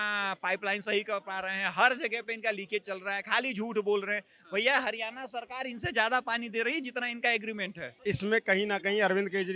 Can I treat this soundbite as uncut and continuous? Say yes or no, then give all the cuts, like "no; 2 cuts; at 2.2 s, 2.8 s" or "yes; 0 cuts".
no; 1 cut; at 7.9 s